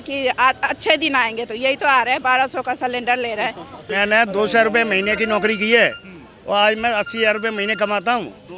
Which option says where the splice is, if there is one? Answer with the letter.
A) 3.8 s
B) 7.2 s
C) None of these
A